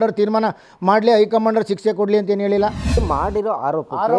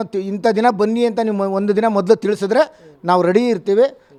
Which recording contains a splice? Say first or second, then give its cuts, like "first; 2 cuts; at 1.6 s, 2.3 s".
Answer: first; 1 cut; at 3.0 s